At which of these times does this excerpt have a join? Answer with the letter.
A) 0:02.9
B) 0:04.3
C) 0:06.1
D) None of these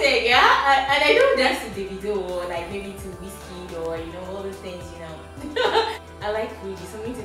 C